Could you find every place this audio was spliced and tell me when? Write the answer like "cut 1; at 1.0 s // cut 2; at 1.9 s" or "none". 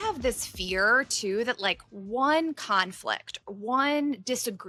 none